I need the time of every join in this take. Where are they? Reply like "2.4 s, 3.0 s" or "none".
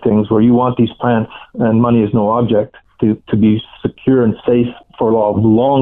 2.8 s, 4.8 s